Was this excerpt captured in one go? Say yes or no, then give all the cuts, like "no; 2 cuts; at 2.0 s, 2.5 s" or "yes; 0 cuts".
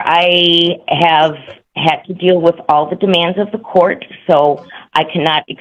yes; 0 cuts